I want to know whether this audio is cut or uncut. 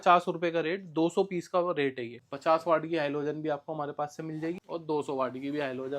cut